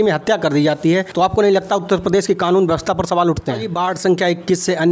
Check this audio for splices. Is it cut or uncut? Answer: cut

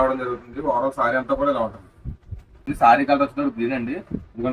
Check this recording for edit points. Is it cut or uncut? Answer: cut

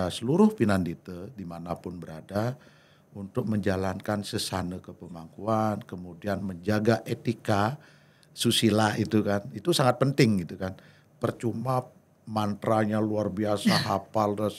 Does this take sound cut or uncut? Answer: uncut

